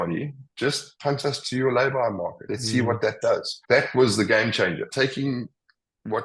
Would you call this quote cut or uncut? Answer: cut